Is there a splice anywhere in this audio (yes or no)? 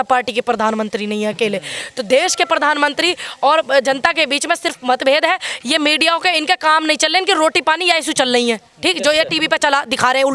no